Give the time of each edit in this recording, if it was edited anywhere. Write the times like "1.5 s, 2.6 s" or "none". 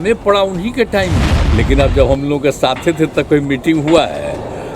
1.4 s

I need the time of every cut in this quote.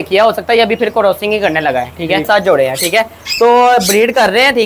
2.3 s

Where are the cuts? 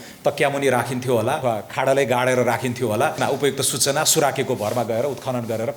1.4 s, 3.2 s

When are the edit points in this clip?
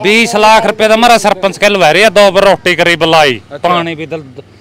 none

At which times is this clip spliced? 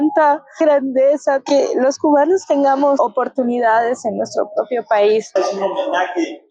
5.4 s

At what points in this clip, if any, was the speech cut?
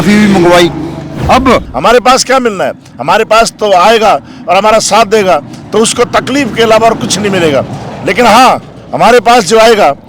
1.7 s

